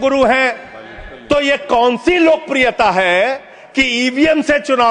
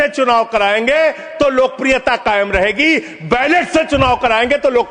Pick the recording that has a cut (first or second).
first